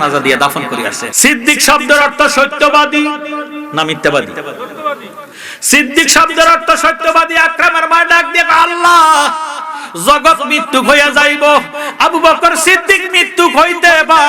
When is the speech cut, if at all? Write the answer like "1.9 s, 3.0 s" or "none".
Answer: 1.0 s